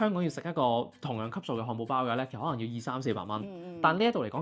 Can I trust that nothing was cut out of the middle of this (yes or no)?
yes